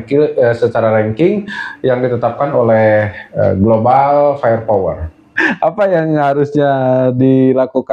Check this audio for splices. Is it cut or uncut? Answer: cut